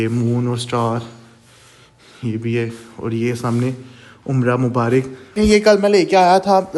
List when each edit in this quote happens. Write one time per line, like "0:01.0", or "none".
0:05.3